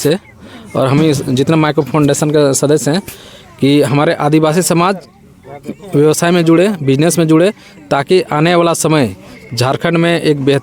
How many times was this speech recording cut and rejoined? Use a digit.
0